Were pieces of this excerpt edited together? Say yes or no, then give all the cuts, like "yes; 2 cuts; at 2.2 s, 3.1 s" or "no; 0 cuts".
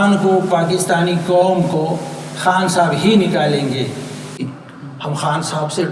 yes; 1 cut; at 4.4 s